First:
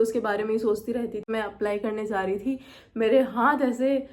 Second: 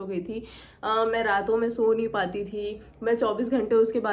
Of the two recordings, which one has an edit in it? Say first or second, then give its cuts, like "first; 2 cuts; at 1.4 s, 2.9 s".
first; 1 cut; at 1.3 s